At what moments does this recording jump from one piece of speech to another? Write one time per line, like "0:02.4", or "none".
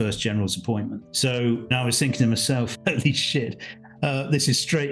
0:01.1
0:01.7